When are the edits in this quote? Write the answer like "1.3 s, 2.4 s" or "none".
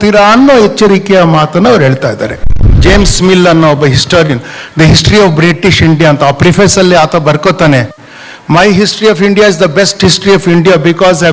2.8 s